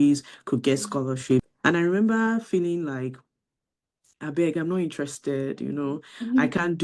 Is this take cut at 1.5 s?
yes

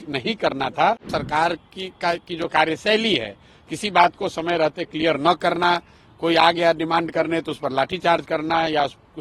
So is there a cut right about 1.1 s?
yes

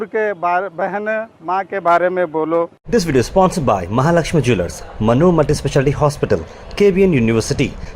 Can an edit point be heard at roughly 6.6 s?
no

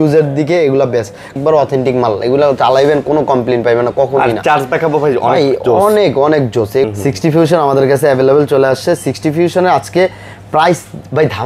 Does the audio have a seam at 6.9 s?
yes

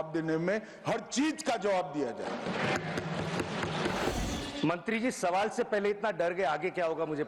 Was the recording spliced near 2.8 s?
no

